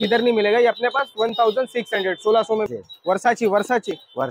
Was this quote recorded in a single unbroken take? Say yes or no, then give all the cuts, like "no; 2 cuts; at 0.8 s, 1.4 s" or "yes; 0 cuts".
no; 1 cut; at 2.7 s